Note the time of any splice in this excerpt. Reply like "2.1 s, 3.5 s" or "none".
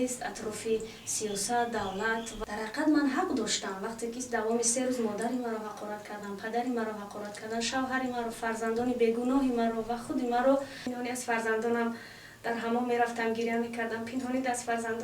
2.3 s, 10.8 s